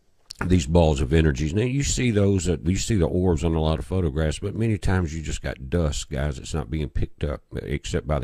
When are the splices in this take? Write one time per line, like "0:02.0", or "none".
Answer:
none